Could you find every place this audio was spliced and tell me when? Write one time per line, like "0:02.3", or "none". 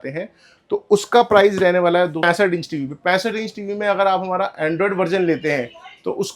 0:02.2